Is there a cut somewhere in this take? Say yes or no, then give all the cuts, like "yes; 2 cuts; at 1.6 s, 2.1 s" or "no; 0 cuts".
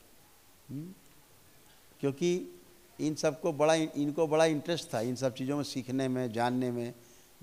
no; 0 cuts